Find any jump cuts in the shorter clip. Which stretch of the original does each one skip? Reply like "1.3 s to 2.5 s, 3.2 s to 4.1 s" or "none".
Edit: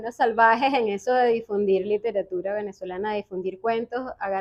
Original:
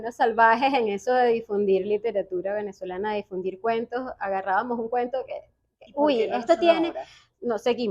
none